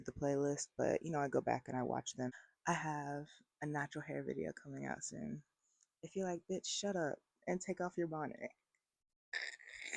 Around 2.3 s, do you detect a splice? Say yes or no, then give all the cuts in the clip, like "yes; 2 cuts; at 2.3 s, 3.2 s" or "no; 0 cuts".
yes; 1 cut; at 2.3 s